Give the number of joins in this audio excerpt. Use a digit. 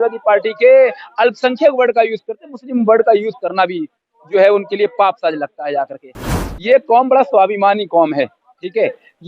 1